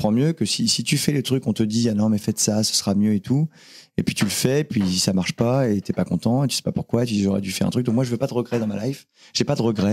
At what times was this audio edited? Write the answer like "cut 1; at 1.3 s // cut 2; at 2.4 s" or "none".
none